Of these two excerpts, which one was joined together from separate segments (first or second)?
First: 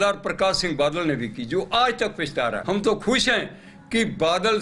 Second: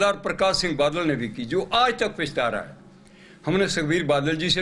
first